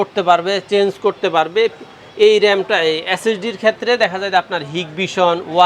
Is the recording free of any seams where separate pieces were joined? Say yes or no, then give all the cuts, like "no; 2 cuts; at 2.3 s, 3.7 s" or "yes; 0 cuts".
yes; 0 cuts